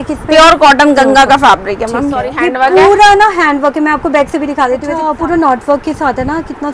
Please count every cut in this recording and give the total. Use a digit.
2